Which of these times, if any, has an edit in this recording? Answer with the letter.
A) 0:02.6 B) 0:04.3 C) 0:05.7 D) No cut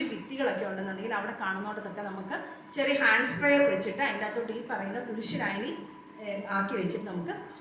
D